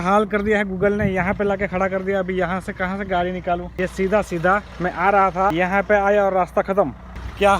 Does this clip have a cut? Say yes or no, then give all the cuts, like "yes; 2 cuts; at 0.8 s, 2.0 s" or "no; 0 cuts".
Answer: yes; 3 cuts; at 3.7 s, 4.7 s, 5.5 s